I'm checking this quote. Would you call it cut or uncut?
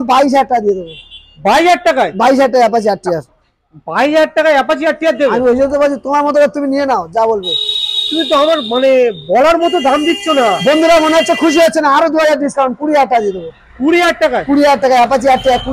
uncut